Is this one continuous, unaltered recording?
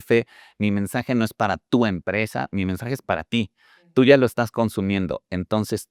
yes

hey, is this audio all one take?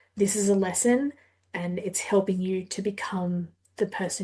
yes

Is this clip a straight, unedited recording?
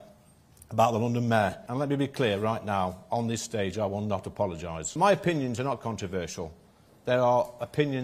no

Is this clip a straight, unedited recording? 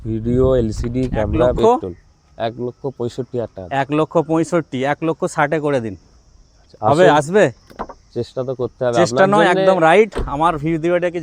no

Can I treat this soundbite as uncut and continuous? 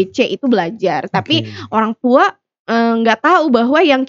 yes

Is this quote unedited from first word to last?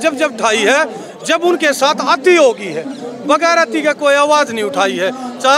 yes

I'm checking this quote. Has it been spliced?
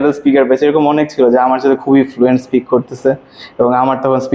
no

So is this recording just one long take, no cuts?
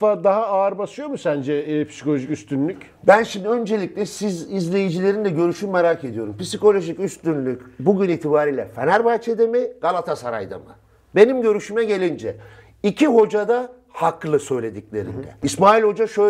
yes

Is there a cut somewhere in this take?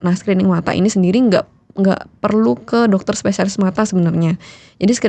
no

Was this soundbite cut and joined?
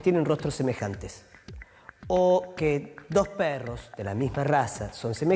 yes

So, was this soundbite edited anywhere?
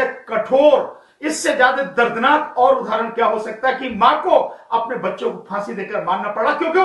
no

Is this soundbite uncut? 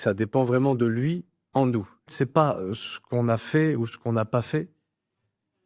no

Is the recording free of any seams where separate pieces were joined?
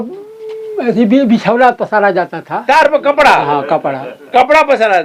yes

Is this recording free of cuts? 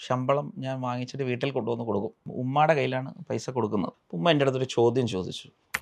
no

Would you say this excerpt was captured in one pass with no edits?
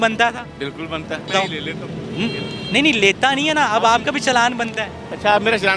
no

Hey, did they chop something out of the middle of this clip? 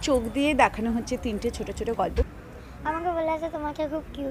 yes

